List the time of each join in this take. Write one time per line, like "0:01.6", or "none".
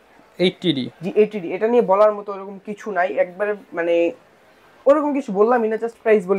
none